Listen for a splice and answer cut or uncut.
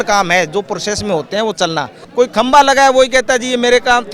cut